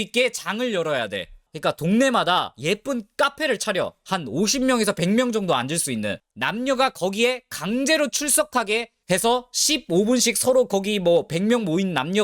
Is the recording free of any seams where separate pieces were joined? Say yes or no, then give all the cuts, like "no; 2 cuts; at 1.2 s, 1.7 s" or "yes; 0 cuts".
yes; 0 cuts